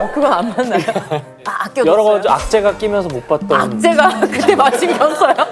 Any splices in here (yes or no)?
yes